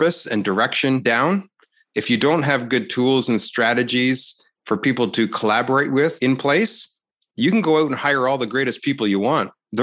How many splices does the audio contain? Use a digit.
2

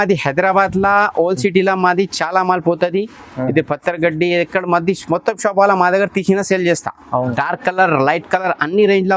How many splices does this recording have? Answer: 1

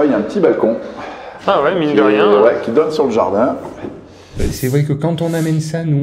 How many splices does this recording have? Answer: 1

